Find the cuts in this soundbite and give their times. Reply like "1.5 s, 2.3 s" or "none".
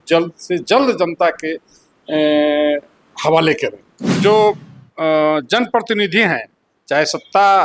4.1 s